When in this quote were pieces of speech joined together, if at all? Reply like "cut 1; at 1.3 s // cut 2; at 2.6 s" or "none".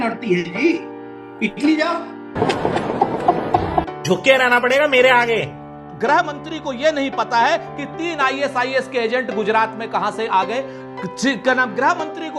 none